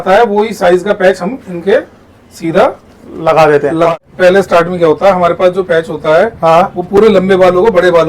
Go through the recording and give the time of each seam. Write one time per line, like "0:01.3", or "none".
0:04.0

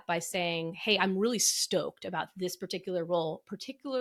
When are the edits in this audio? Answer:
none

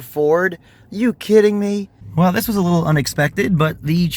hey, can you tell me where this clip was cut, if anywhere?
0:02.0

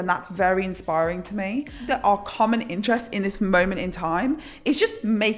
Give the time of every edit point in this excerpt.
0:01.9

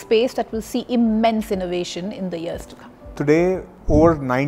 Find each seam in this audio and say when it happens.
none

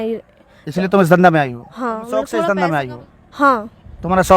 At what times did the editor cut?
0:02.3

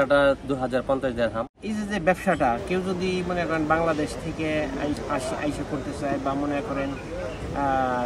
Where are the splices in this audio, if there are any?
0:01.6

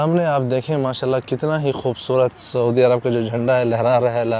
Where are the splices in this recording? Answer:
none

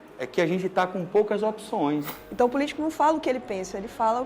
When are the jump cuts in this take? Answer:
0:02.2

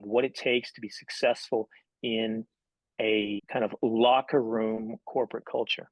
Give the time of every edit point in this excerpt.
0:03.4

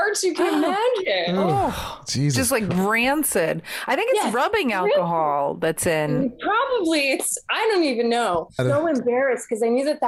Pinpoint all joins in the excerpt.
none

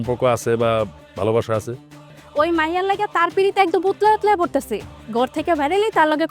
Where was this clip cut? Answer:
0:02.2

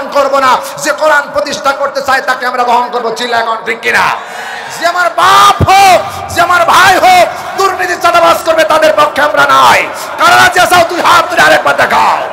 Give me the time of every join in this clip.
none

